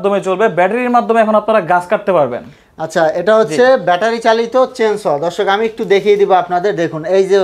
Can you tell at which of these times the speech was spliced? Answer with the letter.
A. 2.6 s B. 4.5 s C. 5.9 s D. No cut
D